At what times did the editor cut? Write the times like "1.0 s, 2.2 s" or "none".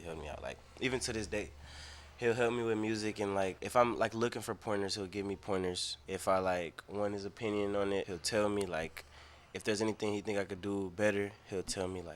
3.6 s, 5.9 s, 8.2 s